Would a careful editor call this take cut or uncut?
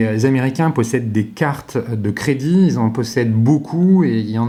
uncut